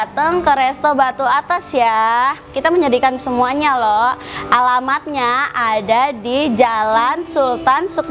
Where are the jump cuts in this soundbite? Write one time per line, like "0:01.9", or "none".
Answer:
none